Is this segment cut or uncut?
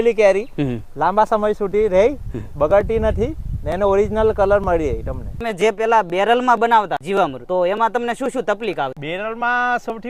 cut